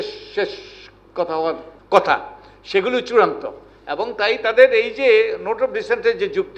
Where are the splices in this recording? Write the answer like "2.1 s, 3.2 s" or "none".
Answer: 1.7 s